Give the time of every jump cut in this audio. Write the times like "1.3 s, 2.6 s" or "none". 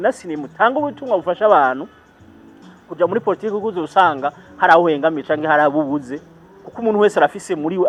none